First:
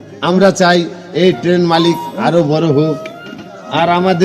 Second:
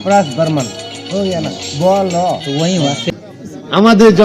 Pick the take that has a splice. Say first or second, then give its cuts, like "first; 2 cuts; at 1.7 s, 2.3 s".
second; 1 cut; at 3.0 s